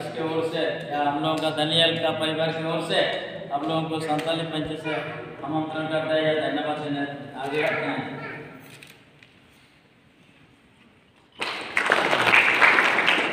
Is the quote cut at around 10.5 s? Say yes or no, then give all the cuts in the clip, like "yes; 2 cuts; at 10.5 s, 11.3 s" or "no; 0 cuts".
no; 0 cuts